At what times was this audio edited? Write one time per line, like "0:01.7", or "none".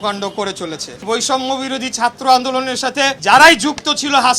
0:01.0
0:03.2

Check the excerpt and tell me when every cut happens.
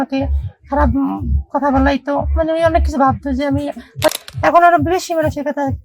0:04.1

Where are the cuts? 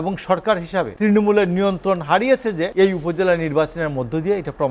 0:00.9
0:02.7

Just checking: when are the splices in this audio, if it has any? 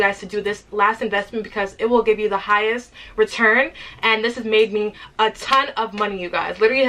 none

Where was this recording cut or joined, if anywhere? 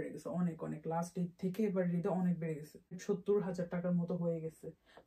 0:03.0

